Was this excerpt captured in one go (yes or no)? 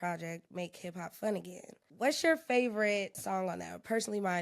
no